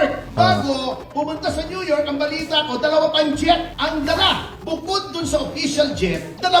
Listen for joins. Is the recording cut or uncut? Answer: uncut